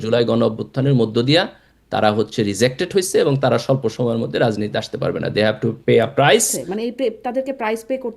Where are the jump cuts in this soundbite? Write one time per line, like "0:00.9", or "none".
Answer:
0:06.6